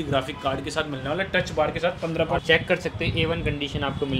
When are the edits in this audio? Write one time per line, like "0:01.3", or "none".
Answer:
0:02.4